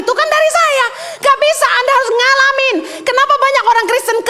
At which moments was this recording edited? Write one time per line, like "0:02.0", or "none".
none